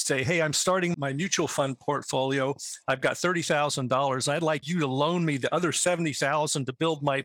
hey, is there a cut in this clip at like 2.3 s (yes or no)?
no